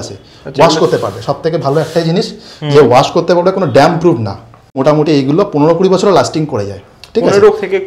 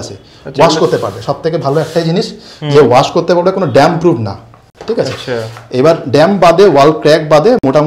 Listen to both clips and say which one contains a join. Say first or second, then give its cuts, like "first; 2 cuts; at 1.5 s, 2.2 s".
first; 1 cut; at 4.8 s